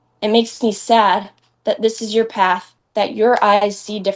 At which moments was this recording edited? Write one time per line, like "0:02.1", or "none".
0:02.8